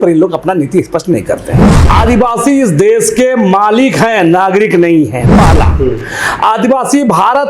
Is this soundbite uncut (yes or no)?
no